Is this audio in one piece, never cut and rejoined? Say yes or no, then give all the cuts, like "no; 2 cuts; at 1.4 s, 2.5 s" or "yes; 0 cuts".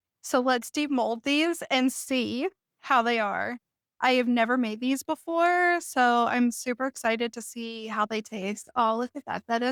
yes; 0 cuts